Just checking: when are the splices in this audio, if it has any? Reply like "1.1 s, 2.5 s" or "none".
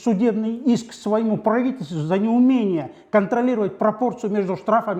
none